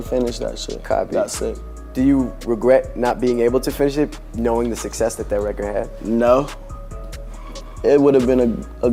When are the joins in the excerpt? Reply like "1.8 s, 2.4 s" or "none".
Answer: none